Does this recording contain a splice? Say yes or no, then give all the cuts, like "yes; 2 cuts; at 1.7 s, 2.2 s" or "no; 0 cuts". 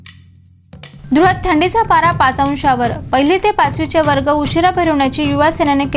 no; 0 cuts